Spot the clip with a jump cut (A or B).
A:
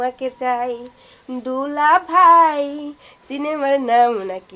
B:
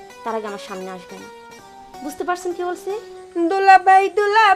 B